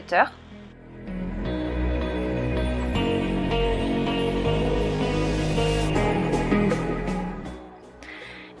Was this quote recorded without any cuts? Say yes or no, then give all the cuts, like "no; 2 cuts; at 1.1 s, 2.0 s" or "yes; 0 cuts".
yes; 0 cuts